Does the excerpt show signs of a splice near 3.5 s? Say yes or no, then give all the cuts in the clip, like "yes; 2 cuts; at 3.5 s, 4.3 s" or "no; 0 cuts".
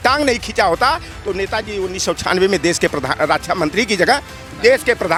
no; 0 cuts